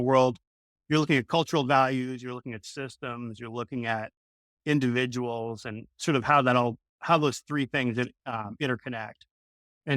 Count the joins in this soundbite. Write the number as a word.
zero